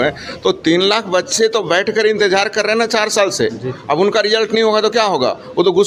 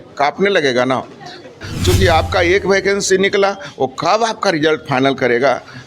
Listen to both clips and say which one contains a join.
second; 1 cut; at 1.6 s

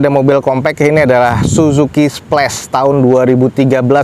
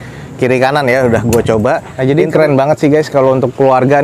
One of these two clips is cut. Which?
second; 1 cut; at 1.9 s

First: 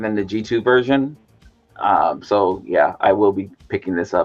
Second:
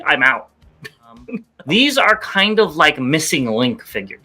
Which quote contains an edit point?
second; 1 cut; at 1.5 s

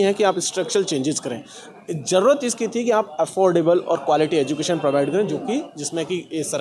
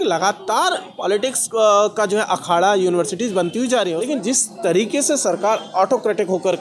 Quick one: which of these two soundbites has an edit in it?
second; 2 cuts; at 1.4 s, 4.0 s

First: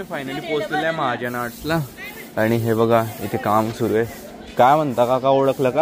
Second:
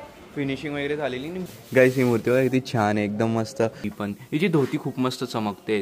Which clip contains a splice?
second; 2 cuts; at 1.4 s, 3.8 s

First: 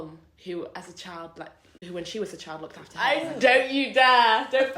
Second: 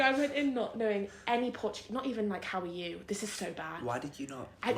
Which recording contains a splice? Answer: first; 2 cuts; at 1.7 s, 2.8 s

